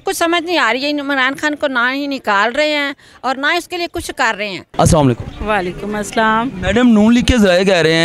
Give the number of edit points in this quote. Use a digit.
0